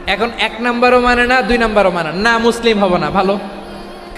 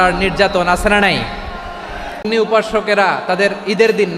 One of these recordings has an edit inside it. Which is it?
second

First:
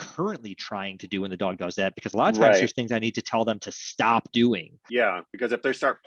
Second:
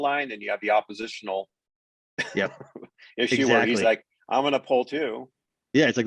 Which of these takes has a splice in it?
first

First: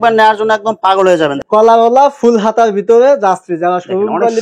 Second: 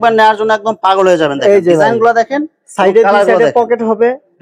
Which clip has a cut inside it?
first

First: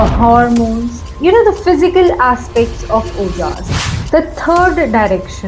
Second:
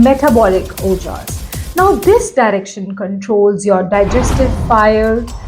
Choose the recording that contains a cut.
first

